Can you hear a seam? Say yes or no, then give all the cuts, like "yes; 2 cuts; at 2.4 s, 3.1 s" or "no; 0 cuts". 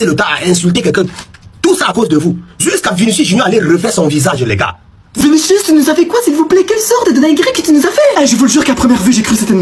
yes; 1 cut; at 5.1 s